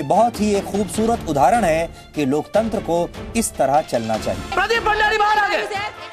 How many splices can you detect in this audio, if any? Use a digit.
1